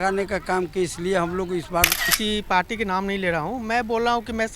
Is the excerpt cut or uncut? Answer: cut